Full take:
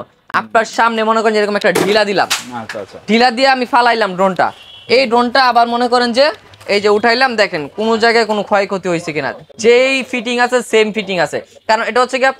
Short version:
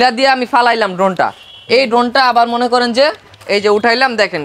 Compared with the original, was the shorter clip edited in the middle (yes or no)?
no